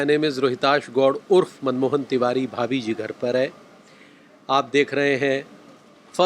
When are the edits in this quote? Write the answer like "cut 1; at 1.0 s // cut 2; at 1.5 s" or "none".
none